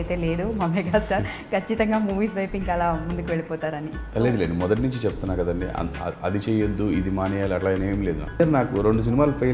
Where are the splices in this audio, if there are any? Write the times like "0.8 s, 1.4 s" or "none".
8.4 s

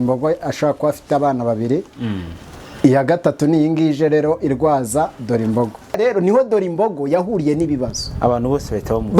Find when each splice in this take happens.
6.0 s

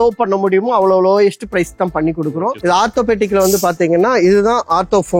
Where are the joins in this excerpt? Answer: 2.6 s

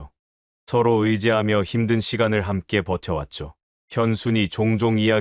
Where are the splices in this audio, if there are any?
none

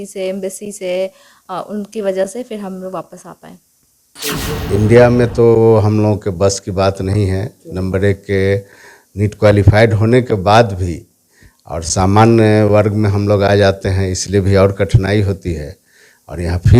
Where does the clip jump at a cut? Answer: 4.1 s

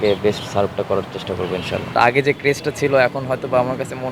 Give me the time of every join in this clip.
1.9 s

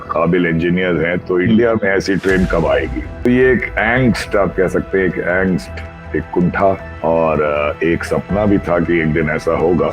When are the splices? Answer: 3.2 s, 6.9 s

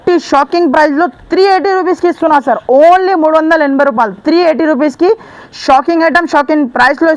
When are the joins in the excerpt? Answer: none

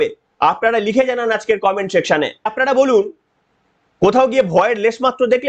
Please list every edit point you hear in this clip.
2.5 s

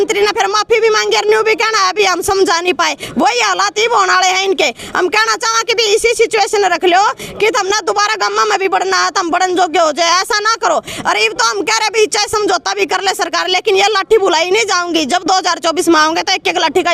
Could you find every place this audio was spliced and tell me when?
none

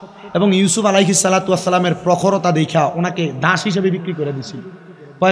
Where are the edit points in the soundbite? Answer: none

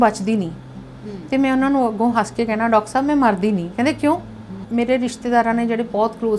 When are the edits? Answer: 4.6 s

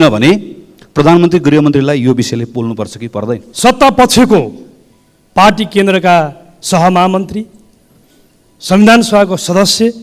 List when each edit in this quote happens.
3.4 s

